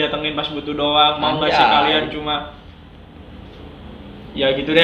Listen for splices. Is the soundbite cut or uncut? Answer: uncut